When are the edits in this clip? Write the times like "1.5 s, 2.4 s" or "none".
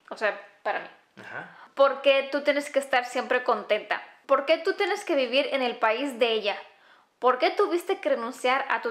1.6 s, 4.1 s